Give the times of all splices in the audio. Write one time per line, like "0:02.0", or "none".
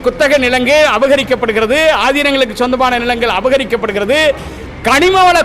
none